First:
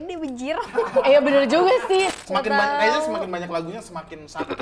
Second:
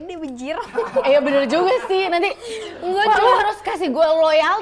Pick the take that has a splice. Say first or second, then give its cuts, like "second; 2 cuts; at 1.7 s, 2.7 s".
first; 1 cut; at 2.1 s